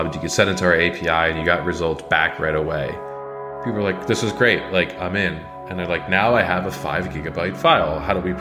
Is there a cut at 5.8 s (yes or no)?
no